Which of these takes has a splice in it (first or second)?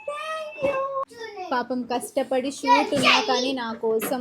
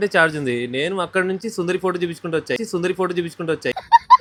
first